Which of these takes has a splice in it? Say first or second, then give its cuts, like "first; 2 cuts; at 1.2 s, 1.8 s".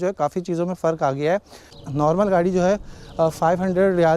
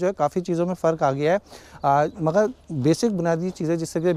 first; 1 cut; at 1.7 s